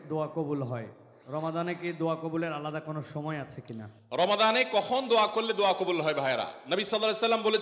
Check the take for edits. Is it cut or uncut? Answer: uncut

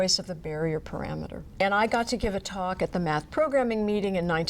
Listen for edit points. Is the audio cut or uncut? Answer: cut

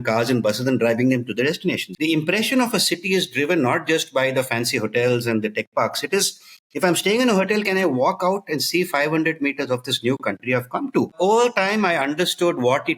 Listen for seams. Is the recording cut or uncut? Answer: cut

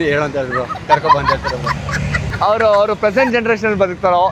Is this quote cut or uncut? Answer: uncut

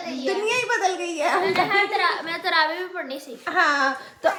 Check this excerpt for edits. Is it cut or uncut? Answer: uncut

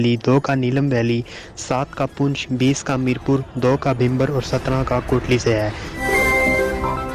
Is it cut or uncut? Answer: cut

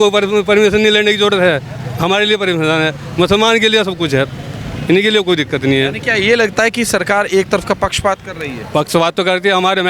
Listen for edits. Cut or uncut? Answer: uncut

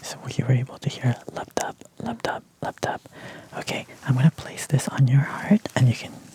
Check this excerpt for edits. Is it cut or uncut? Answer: uncut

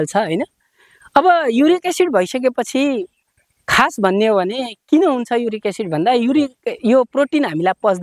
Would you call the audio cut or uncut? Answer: uncut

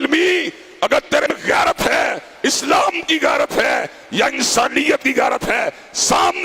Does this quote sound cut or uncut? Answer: cut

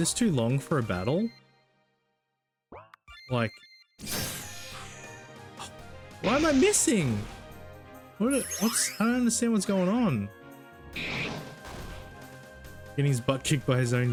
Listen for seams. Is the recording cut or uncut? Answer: uncut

